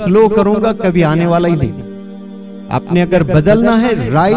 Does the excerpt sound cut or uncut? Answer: uncut